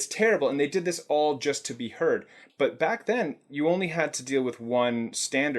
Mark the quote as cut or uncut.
cut